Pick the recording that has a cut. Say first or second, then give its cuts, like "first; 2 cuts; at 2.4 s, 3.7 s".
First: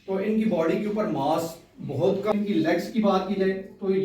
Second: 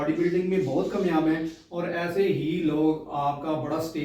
first; 1 cut; at 2.3 s